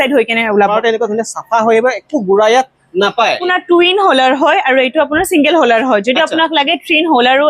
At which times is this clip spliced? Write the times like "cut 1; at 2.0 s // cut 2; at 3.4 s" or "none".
cut 1; at 0.7 s // cut 2; at 3.4 s